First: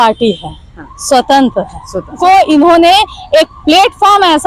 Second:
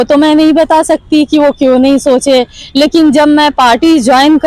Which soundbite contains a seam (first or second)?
first